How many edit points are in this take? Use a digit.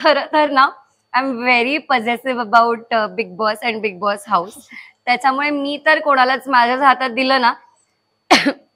0